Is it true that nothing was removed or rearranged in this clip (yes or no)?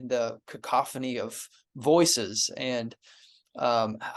yes